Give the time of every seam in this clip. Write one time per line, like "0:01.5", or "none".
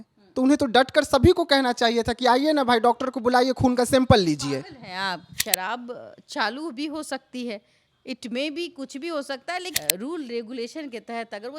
0:05.3
0:09.7